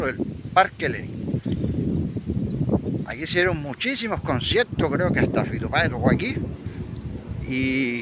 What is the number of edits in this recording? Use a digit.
0